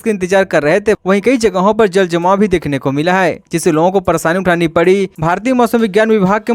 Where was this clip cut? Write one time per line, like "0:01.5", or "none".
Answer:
0:01.0
0:05.1